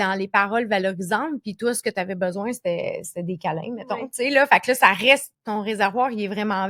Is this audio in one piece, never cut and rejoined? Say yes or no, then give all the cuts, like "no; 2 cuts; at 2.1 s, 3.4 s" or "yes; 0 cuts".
no; 1 cut; at 5.3 s